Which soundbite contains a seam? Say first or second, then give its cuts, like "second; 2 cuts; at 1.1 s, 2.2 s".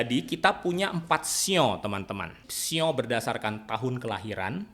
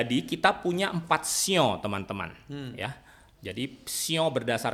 first; 1 cut; at 2.5 s